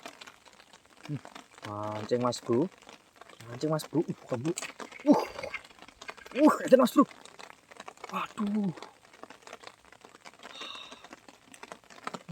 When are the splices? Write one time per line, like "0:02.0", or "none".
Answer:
none